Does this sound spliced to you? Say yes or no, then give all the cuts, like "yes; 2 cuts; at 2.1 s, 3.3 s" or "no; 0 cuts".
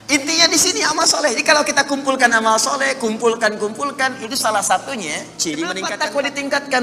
yes; 1 cut; at 5.9 s